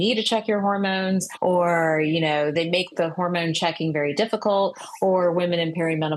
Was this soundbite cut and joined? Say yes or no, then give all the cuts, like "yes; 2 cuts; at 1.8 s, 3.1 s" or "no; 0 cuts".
yes; 2 cuts; at 1.3 s, 2.5 s